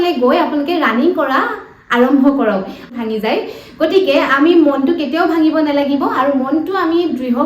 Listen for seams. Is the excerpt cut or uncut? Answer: cut